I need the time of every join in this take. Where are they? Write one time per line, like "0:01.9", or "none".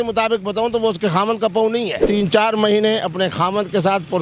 0:02.0